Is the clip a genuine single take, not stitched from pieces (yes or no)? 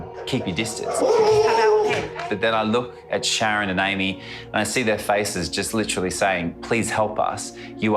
yes